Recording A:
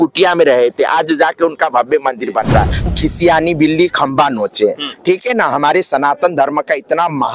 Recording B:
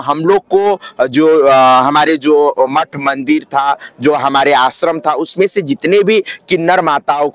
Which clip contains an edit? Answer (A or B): A